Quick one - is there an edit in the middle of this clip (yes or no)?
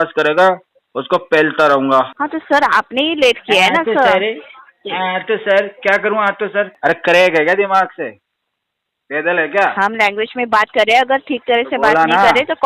yes